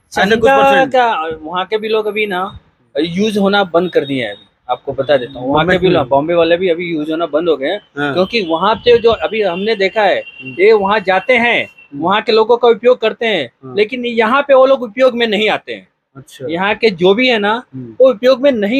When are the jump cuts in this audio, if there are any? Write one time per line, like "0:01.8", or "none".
none